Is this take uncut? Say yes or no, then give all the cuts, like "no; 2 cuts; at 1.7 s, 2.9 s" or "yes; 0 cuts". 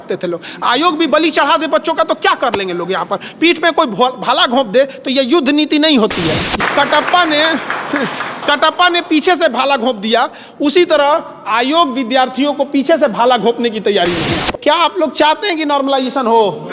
no; 2 cuts; at 6.5 s, 14.5 s